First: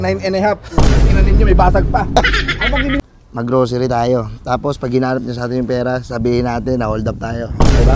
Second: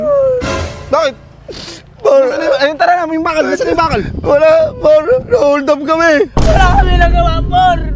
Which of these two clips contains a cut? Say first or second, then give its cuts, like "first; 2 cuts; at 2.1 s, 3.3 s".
first; 1 cut; at 3.0 s